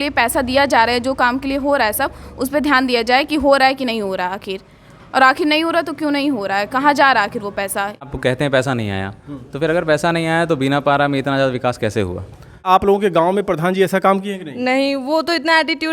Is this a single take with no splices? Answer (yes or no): no